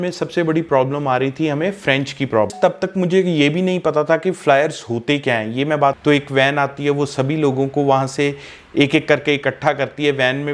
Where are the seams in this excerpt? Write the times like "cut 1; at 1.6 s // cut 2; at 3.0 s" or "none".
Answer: cut 1; at 2.5 s // cut 2; at 6.0 s